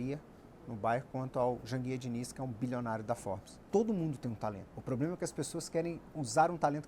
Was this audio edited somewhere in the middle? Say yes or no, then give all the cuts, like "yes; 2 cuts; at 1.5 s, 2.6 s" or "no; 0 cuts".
yes; 1 cut; at 3.6 s